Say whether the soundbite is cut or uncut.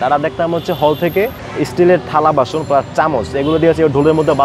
cut